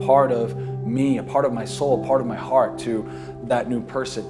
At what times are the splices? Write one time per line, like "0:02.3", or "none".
none